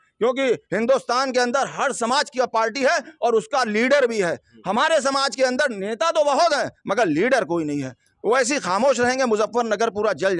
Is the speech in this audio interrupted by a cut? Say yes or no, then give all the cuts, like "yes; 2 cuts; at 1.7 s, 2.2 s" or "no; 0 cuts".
no; 0 cuts